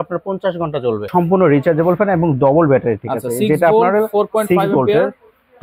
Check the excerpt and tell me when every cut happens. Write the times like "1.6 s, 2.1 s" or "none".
1.1 s